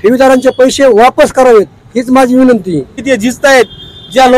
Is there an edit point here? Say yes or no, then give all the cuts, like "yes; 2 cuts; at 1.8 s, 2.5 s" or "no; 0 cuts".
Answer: yes; 1 cut; at 3.0 s